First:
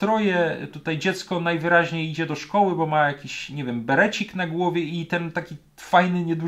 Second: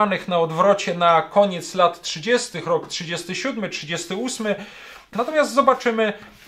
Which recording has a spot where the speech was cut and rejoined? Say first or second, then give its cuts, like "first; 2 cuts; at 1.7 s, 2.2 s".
second; 1 cut; at 5.1 s